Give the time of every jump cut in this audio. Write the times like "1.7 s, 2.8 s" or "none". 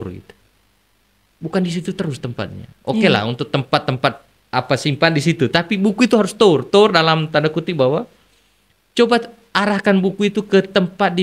none